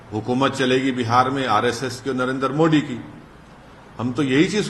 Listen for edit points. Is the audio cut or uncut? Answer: uncut